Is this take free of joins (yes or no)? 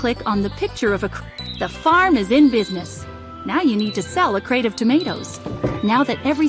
no